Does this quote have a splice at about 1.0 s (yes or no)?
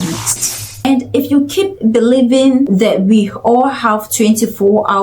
no